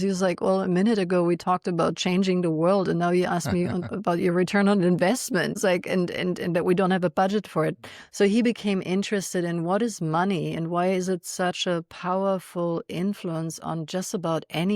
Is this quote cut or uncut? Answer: cut